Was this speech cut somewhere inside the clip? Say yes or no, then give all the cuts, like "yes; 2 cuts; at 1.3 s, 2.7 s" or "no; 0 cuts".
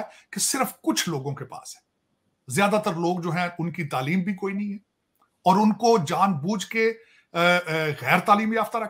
no; 0 cuts